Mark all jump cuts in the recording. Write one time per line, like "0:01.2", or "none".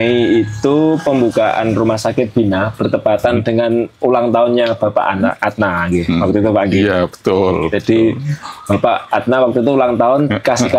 none